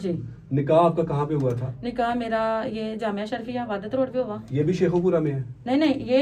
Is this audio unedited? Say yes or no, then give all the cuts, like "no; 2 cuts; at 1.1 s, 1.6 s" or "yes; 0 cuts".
yes; 0 cuts